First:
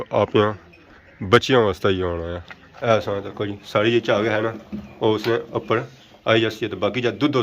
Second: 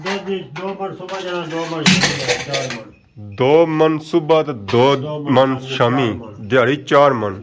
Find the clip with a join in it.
first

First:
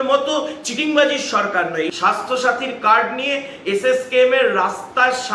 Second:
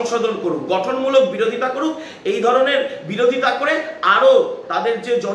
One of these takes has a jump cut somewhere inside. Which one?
first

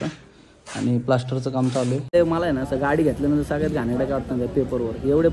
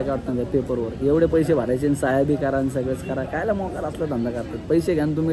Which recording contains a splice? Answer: first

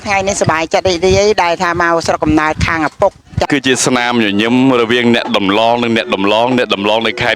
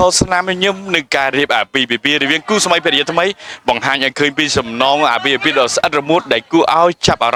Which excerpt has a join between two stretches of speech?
first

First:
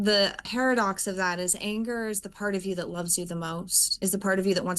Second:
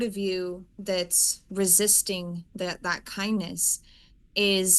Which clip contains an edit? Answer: first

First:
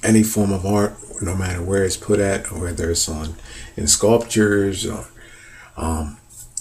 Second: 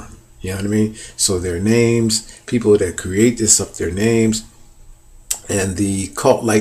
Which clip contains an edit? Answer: second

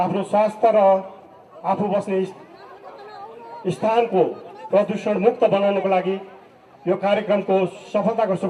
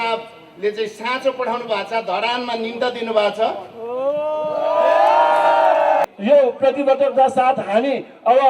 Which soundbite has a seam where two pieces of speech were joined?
second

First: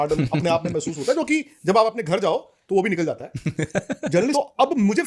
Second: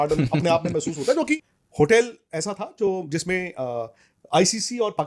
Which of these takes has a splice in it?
second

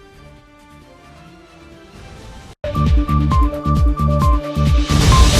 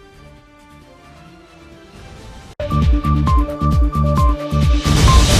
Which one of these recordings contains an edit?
first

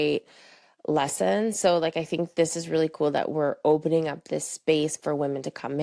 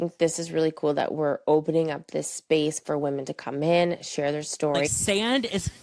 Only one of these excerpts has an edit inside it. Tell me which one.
second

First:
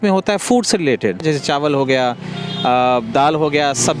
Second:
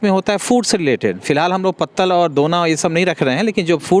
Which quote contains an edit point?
first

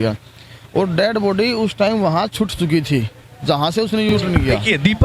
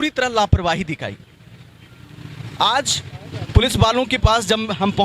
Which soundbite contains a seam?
first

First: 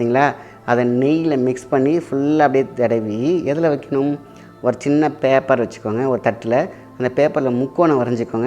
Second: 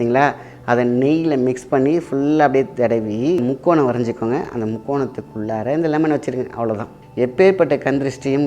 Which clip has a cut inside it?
second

